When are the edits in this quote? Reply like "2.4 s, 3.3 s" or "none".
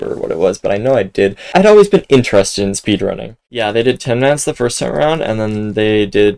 3.3 s